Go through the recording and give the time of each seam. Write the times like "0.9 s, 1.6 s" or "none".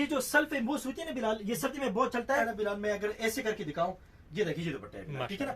2.4 s